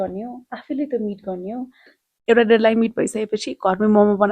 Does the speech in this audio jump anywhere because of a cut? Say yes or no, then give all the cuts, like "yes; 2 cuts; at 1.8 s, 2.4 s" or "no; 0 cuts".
yes; 1 cut; at 1.9 s